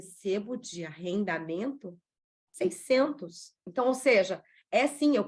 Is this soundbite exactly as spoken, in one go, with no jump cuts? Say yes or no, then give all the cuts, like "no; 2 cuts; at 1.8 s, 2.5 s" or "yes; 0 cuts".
no; 1 cut; at 3.6 s